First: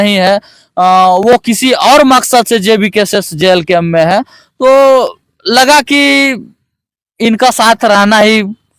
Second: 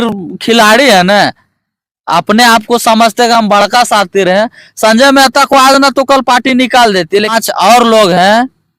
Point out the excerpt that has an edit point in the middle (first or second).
second